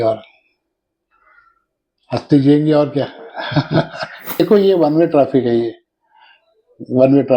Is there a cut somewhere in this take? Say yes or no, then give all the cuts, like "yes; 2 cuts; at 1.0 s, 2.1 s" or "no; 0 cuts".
yes; 1 cut; at 4.4 s